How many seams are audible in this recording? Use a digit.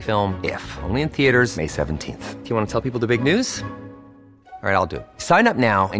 0